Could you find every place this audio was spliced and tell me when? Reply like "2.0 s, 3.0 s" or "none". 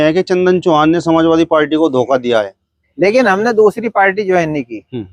2.6 s